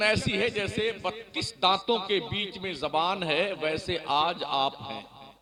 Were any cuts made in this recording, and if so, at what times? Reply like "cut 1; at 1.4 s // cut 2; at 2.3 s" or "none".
none